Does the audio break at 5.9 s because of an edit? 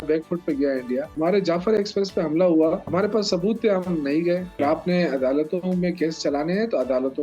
no; 3 cuts; at 1.1 s, 2.8 s, 4.6 s

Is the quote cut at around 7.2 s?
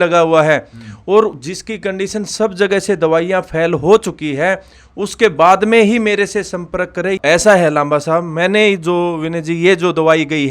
yes; 1 cut; at 7.2 s

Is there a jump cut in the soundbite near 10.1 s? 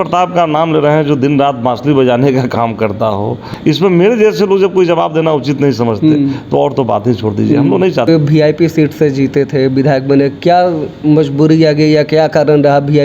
no; 2 cuts; at 3.4 s, 8.1 s

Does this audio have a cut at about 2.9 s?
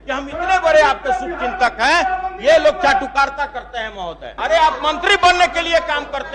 no; 1 cut; at 4.2 s

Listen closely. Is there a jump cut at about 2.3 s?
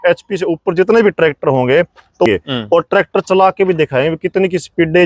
yes; 1 cut; at 2.3 s

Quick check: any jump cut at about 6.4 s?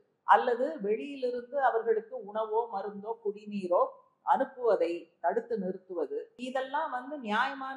yes; 1 cut; at 6.4 s

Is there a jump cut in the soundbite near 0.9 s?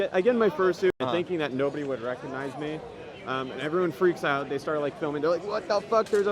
yes; 1 cut; at 0.9 s

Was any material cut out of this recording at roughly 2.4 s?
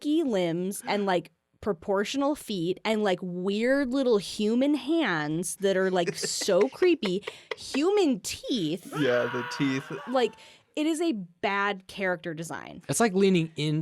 no; 2 cuts; at 9.9 s, 12.7 s

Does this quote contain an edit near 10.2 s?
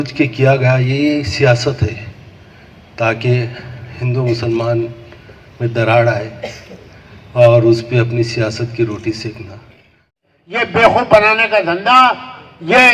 yes; 1 cut; at 10.2 s

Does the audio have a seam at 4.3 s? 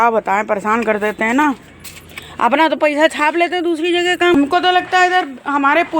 yes; 1 cut; at 4.3 s

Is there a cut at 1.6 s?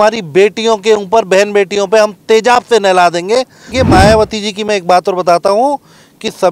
no; 1 cut; at 3.7 s

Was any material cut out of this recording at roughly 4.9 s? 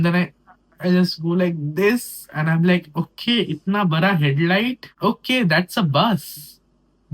yes; 1 cut; at 4.9 s

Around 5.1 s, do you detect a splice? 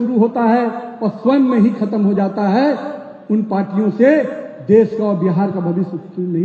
no; 0 cuts

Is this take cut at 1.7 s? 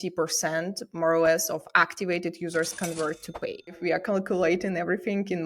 no; 1 cut; at 3.8 s

